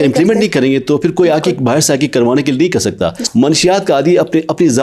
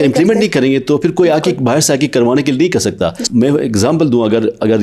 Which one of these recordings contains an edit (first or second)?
first